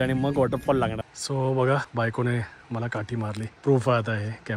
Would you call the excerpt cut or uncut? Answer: cut